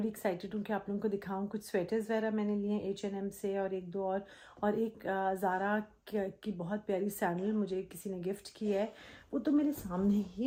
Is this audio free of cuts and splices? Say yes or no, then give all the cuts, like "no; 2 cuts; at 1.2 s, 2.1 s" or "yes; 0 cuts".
yes; 0 cuts